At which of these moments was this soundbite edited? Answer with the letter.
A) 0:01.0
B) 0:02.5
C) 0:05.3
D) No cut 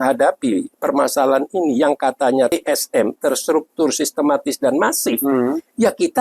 B